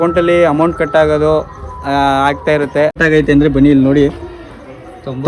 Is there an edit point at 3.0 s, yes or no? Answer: yes